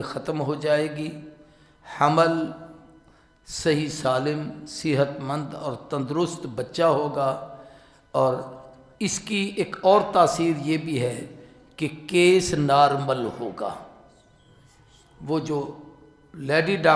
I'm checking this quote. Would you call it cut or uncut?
uncut